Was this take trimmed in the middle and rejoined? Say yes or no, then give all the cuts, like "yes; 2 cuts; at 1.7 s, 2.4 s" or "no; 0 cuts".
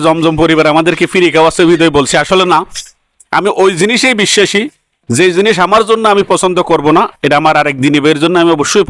no; 0 cuts